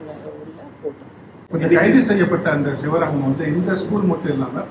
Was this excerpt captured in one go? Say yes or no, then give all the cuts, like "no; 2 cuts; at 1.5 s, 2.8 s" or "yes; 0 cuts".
no; 1 cut; at 1.3 s